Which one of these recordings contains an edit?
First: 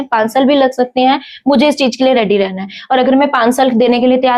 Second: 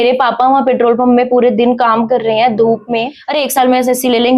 second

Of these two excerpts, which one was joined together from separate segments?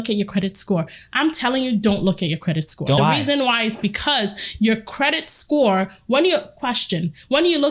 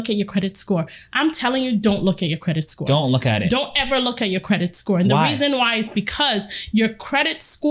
first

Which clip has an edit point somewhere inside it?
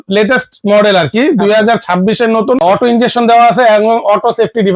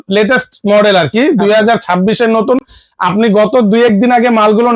first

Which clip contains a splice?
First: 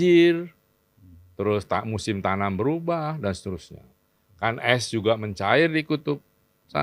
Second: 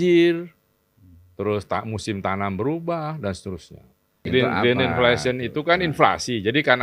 second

